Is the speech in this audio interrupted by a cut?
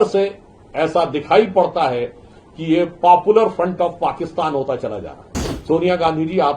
yes; 1 cut; at 5.6 s

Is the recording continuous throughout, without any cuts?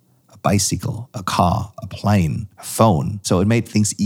no; 1 cut; at 3.1 s

